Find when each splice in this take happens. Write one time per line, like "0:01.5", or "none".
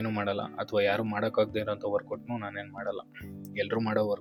none